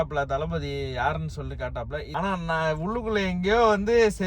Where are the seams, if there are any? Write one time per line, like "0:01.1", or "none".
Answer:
0:02.0